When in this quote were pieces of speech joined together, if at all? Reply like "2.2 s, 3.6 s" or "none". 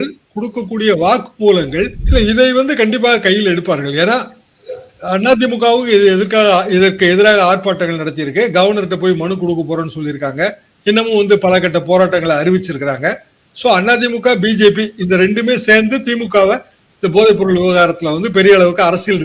2.0 s